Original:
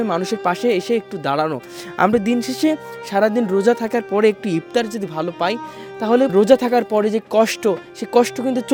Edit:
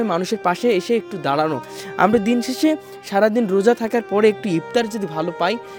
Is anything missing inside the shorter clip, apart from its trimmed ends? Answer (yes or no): no